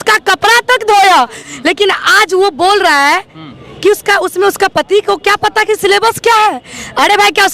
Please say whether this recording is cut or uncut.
cut